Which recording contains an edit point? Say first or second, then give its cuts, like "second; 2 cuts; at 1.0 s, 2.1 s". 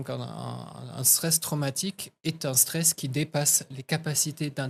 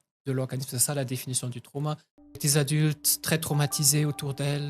second; 1 cut; at 2.4 s